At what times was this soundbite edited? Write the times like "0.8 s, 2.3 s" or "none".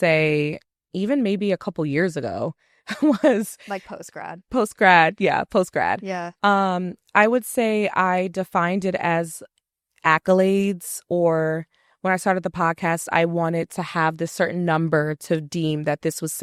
none